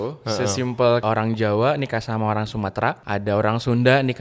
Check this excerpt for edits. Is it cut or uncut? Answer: cut